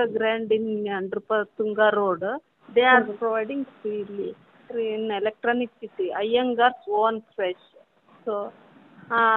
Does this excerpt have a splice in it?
no; 0 cuts

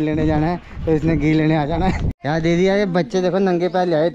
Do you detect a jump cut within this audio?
yes; 1 cut; at 2.1 s

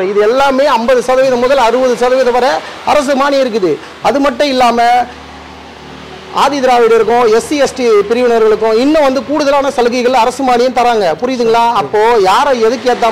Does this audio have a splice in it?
no; 0 cuts

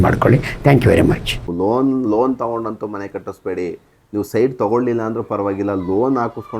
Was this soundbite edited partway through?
yes; 1 cut; at 1.4 s

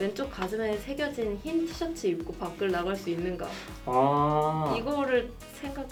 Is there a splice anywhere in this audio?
no; 0 cuts

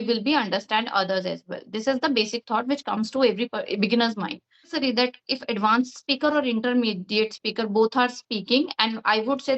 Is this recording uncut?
no; 1 cut; at 4.7 s

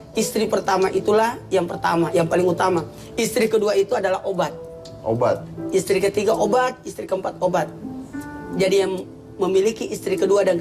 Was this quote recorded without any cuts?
yes; 0 cuts

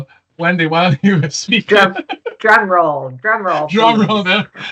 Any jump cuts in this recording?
no; 0 cuts

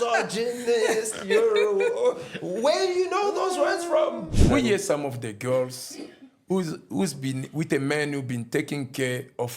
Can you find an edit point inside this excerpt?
yes; 1 cut; at 4.3 s

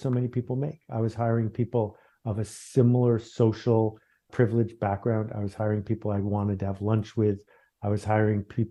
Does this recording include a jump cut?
no; 0 cuts

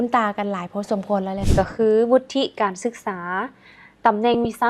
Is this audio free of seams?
no; 1 cut; at 1.4 s

